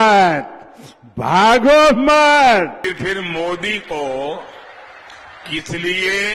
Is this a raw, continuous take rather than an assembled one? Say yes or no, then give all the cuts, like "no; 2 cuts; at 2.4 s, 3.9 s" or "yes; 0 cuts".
yes; 0 cuts